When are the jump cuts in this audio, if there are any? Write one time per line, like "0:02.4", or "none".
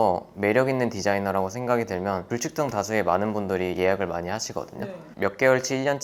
0:05.1